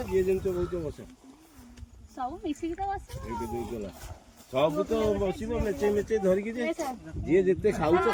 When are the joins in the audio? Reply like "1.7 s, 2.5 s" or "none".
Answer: none